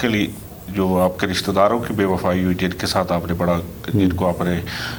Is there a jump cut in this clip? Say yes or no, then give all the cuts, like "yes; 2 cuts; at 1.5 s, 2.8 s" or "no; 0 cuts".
no; 0 cuts